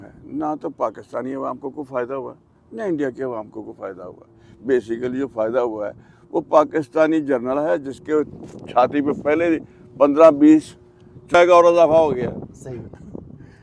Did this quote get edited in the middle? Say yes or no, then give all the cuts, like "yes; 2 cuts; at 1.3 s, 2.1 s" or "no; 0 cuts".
yes; 1 cut; at 11.3 s